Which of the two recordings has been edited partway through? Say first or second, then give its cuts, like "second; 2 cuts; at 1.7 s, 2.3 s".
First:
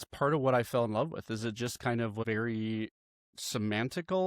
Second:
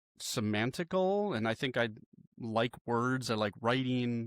first; 1 cut; at 2.2 s